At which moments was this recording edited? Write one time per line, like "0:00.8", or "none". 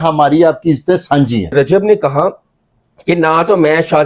0:01.5